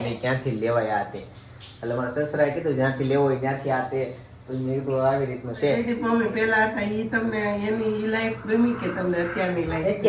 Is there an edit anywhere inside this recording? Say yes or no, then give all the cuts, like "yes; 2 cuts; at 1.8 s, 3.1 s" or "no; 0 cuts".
yes; 1 cut; at 5.8 s